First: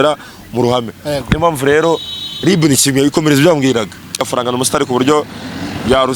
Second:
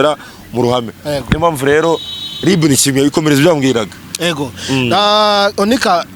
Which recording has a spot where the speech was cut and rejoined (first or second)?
first